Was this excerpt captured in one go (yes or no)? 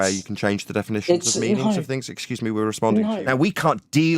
no